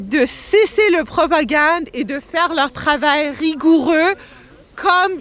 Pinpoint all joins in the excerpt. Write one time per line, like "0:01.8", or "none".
none